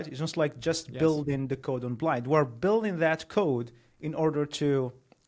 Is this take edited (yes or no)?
no